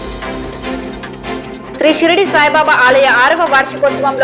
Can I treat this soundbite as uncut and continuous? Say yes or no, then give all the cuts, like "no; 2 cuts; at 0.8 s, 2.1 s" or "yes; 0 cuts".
no; 1 cut; at 1.7 s